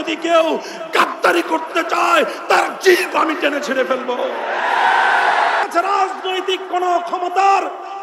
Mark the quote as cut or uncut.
cut